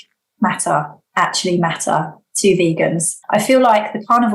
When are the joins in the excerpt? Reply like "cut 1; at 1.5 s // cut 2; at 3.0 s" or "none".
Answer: cut 1; at 3.1 s